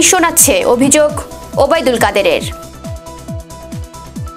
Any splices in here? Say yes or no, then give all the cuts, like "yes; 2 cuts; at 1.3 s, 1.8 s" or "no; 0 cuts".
yes; 1 cut; at 2.4 s